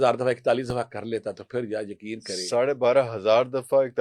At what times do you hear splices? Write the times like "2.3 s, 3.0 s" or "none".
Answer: none